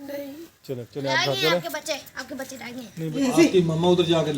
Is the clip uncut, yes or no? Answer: no